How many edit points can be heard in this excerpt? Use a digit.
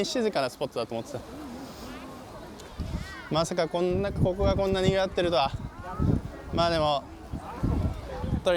0